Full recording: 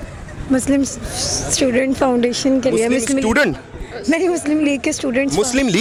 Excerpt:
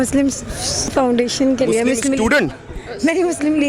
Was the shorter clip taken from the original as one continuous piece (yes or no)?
no